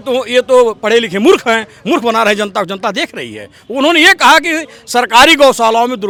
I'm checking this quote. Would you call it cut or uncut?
uncut